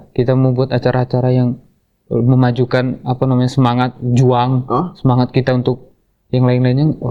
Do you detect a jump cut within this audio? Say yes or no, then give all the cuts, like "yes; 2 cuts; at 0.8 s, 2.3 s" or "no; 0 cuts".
no; 0 cuts